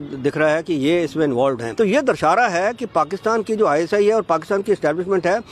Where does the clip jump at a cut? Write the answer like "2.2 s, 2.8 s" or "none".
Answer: none